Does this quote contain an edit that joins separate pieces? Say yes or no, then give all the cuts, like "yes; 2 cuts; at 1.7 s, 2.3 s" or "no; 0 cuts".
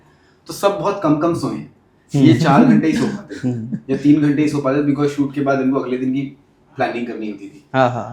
no; 0 cuts